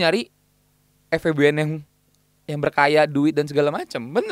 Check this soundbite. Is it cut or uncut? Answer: uncut